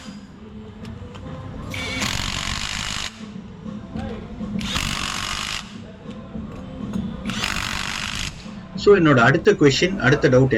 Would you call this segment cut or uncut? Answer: uncut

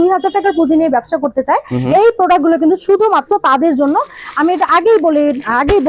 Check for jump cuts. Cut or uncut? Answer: uncut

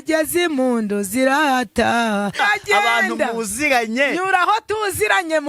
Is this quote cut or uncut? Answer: cut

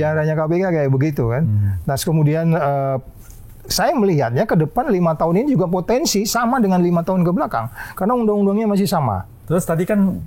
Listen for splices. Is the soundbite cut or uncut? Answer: cut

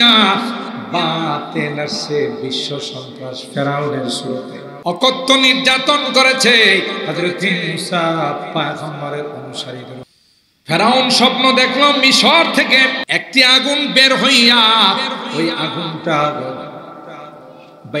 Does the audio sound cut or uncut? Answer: cut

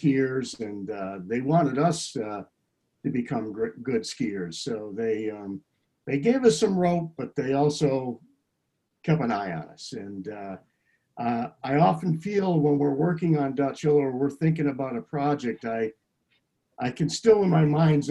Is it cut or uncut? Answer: uncut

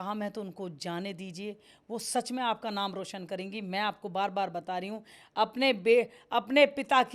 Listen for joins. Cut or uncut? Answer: uncut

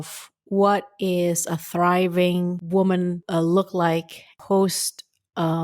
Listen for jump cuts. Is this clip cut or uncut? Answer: cut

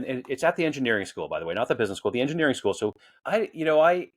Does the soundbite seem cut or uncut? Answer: cut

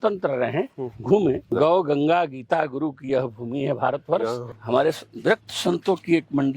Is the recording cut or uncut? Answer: cut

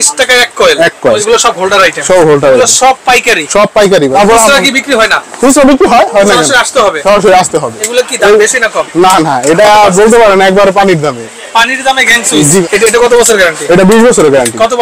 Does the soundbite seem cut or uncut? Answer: cut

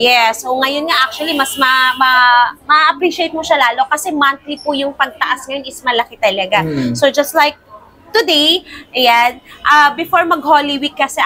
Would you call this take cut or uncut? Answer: uncut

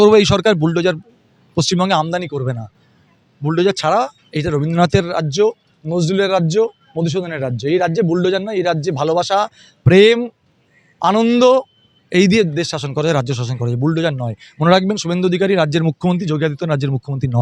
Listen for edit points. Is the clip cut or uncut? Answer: uncut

